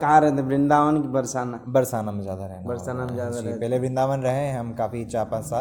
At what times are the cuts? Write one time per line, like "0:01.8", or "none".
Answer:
none